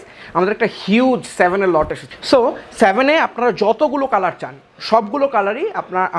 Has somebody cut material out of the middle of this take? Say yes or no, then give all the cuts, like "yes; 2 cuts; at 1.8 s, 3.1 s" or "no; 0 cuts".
no; 0 cuts